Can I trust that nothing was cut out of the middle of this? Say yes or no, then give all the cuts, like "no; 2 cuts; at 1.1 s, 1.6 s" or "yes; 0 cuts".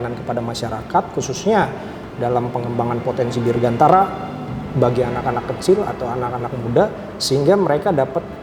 yes; 0 cuts